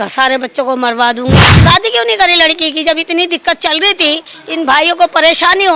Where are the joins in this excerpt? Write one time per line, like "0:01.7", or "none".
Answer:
0:01.4